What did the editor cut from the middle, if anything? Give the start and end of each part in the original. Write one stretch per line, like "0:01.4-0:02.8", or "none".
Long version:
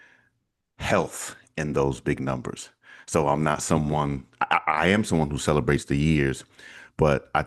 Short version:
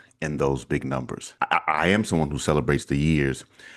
0:02.6-0:04.3